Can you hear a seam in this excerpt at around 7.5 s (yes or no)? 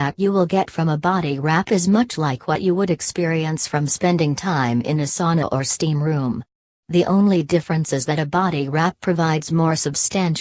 no